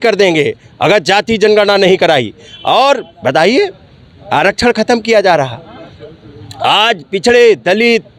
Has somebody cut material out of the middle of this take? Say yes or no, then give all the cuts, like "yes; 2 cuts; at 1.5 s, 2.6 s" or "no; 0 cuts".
no; 0 cuts